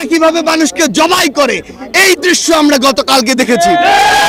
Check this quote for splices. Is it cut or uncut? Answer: uncut